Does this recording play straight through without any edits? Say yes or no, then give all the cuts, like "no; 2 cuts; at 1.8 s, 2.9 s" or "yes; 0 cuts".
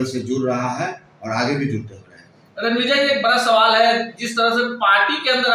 yes; 0 cuts